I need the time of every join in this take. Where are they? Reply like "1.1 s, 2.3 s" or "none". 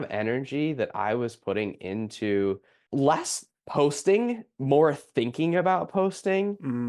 none